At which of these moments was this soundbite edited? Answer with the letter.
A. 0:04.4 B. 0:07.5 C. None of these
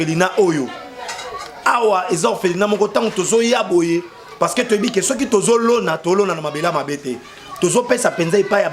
C